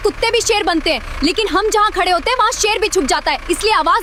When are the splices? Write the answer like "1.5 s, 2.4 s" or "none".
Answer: none